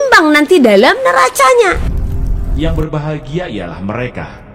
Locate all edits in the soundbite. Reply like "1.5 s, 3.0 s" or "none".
1.9 s